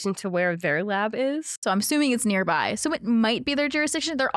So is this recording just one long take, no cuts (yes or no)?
no